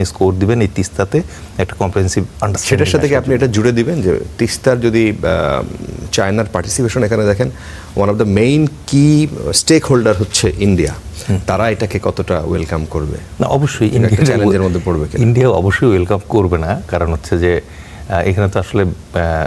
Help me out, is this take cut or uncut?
uncut